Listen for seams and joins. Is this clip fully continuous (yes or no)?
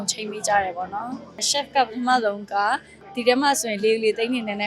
no